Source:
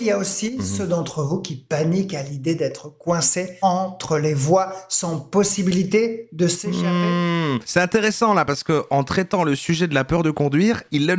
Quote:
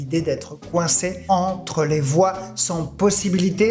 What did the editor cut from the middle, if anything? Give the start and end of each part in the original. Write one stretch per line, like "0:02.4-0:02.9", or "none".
none